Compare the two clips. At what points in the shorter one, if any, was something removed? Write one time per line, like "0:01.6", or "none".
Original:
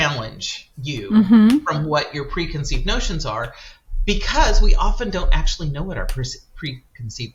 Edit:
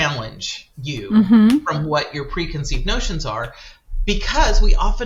none